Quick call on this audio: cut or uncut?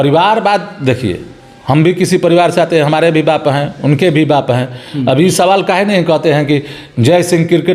uncut